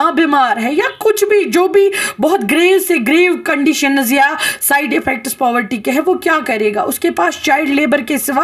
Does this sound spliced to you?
no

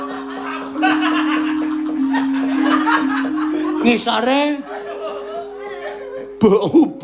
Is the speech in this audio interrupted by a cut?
no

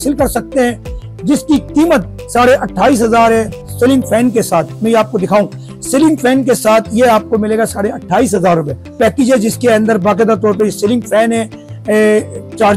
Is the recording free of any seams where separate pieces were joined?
no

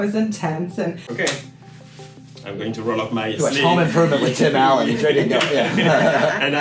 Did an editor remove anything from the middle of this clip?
yes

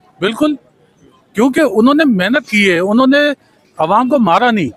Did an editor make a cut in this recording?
no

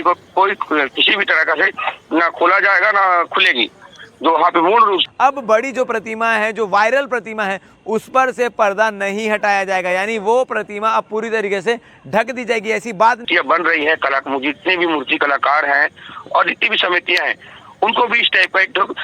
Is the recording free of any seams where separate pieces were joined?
no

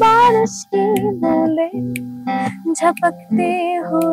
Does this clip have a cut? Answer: no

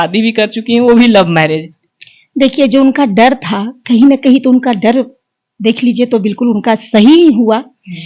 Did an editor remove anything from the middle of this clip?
no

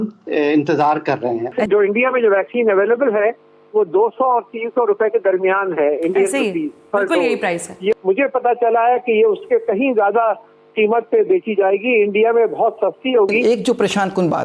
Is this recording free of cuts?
no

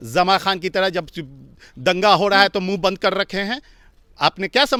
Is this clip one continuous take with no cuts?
yes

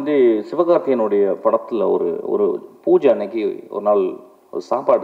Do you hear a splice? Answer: no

